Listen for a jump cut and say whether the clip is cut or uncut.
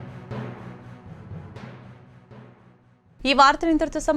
uncut